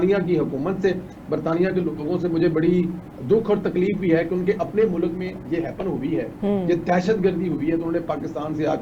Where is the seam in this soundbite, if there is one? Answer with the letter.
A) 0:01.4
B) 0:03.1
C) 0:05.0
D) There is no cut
D